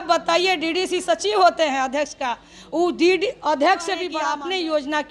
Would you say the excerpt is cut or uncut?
cut